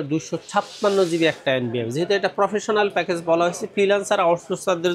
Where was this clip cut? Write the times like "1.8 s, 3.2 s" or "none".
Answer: none